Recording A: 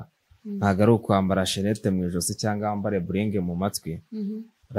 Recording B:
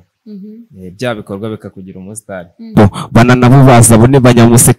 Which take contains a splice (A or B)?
B